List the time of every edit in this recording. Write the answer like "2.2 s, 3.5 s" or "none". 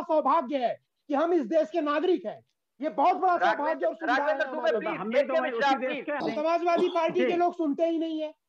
6.2 s